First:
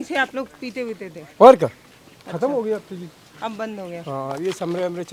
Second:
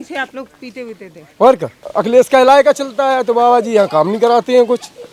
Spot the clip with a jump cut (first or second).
second